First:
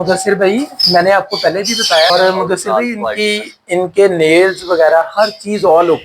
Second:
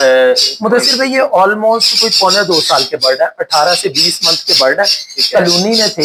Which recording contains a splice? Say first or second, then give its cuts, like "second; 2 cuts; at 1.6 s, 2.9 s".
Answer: first; 1 cut; at 2.1 s